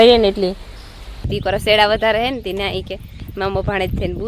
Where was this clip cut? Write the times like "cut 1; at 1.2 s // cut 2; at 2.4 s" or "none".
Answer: cut 1; at 1.3 s